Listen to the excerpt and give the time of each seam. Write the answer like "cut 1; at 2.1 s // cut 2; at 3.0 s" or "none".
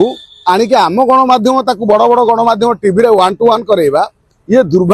none